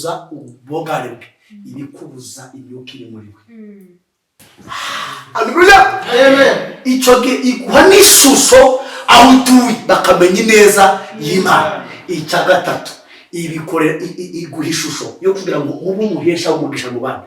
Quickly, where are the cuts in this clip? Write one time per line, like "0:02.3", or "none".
0:04.4